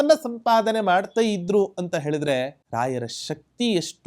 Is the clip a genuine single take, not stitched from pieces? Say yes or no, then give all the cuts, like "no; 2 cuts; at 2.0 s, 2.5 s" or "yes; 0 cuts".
no; 1 cut; at 2.6 s